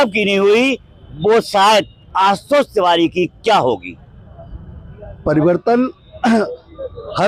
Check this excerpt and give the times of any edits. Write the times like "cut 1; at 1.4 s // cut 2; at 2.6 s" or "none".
none

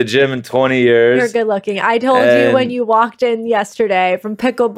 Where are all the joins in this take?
none

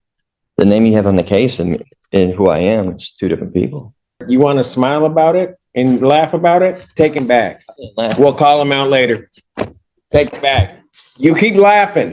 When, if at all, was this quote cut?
cut 1; at 4.2 s

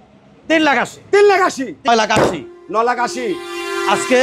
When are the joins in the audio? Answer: cut 1; at 1.9 s

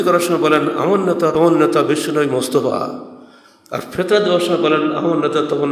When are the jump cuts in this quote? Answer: cut 1; at 1.3 s

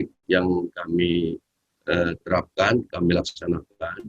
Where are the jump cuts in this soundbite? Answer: none

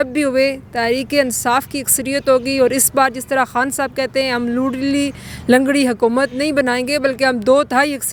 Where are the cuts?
none

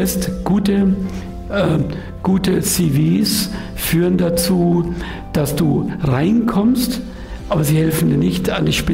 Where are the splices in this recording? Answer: none

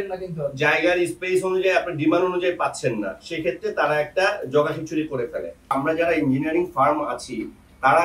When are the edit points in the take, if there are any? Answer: cut 1; at 5.7 s

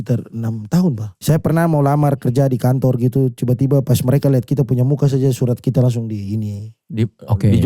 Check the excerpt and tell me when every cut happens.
cut 1; at 1.1 s

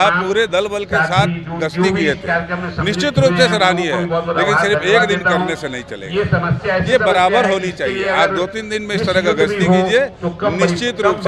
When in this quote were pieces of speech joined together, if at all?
none

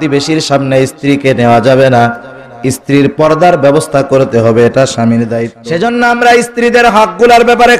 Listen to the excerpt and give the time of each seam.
cut 1; at 5.5 s

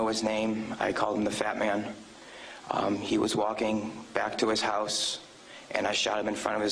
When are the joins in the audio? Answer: cut 1; at 1.7 s

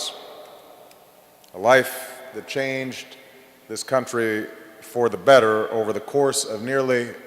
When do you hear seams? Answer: cut 1; at 2.3 s

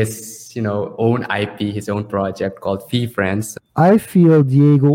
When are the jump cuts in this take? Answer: cut 1; at 3.5 s

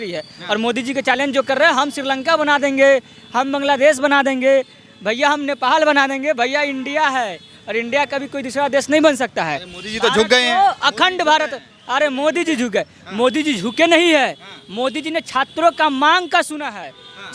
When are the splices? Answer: none

